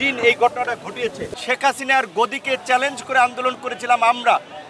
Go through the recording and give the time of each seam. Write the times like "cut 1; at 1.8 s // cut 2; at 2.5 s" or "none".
cut 1; at 1.2 s